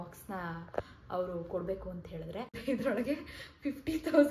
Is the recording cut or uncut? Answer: cut